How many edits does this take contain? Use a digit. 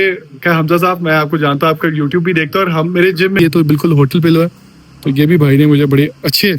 1